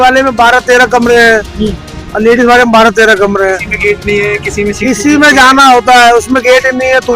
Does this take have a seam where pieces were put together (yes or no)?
no